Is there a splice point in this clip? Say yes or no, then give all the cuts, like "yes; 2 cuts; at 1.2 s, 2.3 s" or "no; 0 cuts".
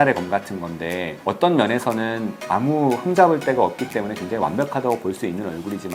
yes; 1 cut; at 1.1 s